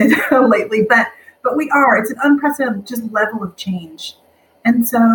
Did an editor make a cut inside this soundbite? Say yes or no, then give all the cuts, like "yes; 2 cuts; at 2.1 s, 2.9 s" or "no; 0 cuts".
no; 0 cuts